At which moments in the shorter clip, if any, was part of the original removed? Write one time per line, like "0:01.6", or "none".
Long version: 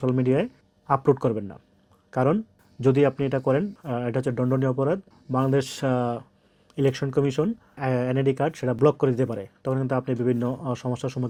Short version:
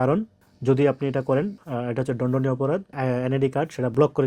0:02.9